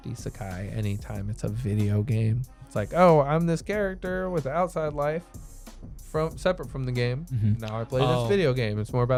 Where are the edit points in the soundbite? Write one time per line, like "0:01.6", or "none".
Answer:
none